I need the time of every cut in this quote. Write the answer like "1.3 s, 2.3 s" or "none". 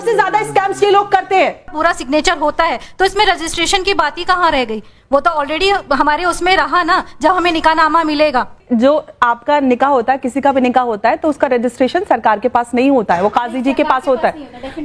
1.7 s, 8.6 s